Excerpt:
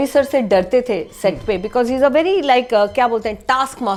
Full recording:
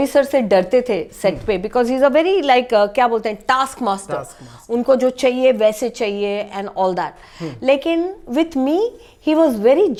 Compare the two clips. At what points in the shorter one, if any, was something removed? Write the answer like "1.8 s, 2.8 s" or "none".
none

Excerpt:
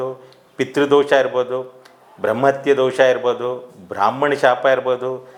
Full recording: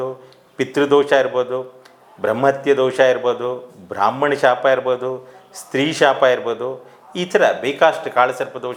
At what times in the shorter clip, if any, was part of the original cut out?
none

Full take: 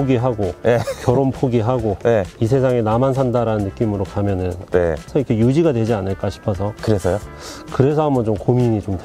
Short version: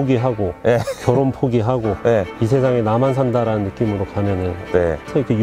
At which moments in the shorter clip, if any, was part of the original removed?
none

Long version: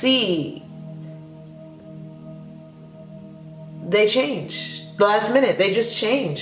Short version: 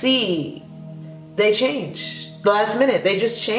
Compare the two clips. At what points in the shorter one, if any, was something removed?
1.1 s

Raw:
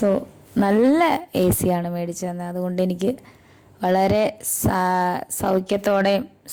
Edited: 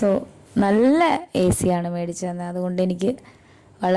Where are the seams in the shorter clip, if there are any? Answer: none

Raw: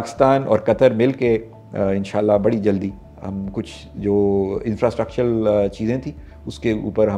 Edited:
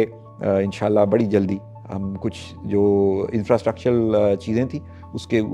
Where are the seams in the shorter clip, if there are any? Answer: none

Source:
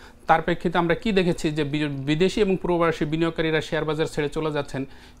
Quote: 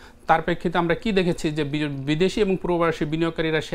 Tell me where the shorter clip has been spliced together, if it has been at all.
none

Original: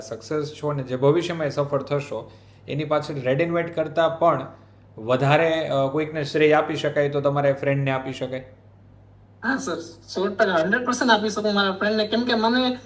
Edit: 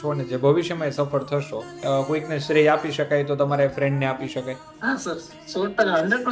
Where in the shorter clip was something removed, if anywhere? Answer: 1.8 s, 4.7 s

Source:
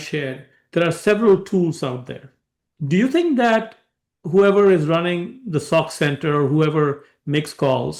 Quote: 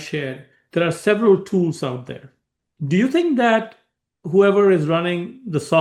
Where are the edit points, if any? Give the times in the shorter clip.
none

